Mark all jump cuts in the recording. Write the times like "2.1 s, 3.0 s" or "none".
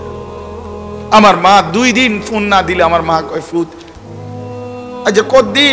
1.1 s